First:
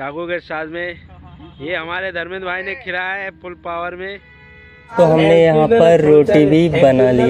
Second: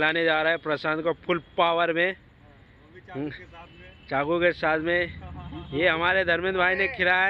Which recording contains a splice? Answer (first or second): first